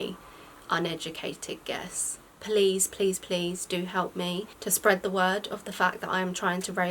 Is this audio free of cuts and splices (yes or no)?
no